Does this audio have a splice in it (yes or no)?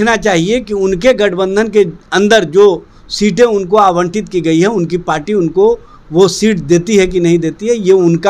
no